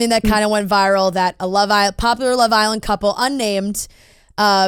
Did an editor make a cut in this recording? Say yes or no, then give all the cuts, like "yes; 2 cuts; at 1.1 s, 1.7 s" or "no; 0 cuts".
no; 0 cuts